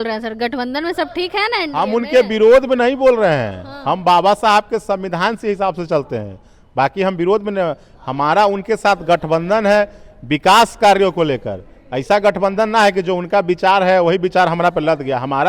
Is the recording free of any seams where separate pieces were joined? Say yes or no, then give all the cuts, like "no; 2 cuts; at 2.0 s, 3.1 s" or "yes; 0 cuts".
yes; 0 cuts